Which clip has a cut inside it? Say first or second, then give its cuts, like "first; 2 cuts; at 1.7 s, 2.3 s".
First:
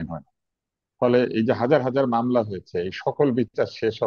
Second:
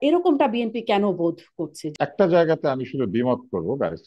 second; 1 cut; at 1.8 s